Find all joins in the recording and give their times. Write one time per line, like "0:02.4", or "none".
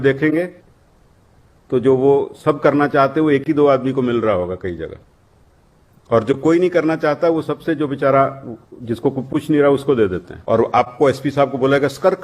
0:10.3